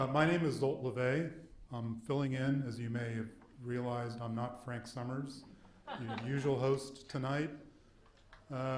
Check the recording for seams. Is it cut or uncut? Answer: cut